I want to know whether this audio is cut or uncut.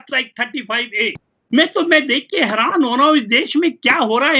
cut